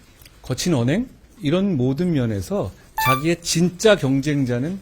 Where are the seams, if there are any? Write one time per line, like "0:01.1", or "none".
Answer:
0:01.2